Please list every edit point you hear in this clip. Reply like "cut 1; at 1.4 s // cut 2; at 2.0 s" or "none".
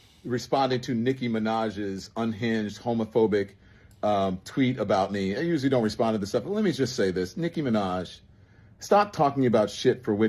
none